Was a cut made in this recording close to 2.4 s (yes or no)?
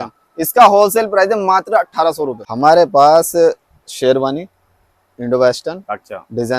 yes